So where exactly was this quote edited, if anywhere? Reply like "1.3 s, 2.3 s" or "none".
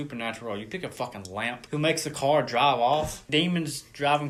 none